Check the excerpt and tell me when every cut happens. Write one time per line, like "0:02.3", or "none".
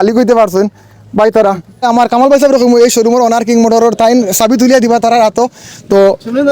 0:01.9